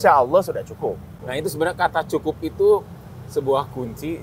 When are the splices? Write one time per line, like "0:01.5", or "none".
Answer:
0:01.1

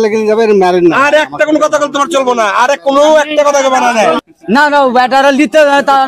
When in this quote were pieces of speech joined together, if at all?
0:04.2

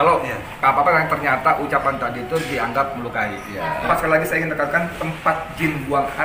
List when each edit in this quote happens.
0:03.8

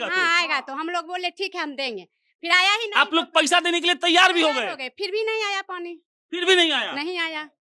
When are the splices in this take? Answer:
none

